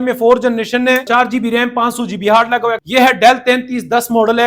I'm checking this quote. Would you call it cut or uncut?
cut